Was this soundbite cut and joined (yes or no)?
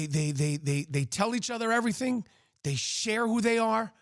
no